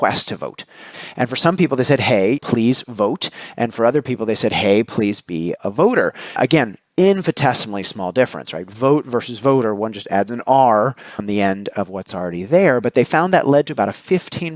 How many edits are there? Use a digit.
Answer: 5